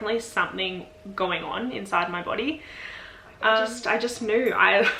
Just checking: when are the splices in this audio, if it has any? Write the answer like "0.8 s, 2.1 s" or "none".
3.8 s